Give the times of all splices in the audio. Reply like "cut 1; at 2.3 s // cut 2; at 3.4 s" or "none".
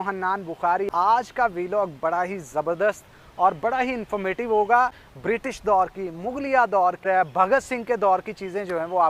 cut 1; at 0.9 s // cut 2; at 5.0 s // cut 3; at 7.0 s